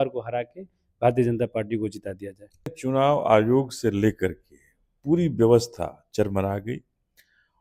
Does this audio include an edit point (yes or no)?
yes